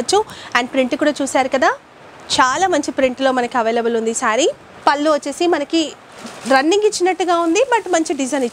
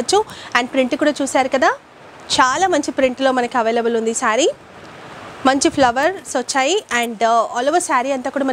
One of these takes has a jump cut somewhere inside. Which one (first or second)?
first